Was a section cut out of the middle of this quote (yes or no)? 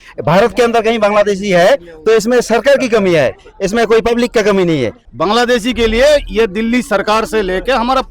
yes